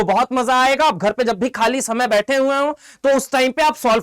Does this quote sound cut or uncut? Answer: uncut